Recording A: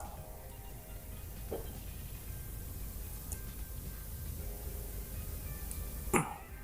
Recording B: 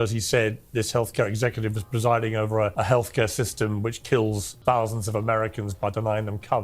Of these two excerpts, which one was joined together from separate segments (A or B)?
B